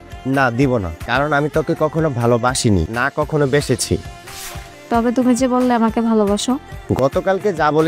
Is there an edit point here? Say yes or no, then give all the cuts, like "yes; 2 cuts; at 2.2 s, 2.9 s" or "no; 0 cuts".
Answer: no; 0 cuts